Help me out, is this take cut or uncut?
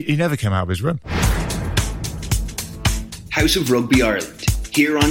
cut